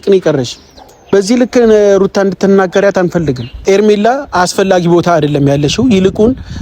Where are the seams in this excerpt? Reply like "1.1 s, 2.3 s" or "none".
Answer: 3.5 s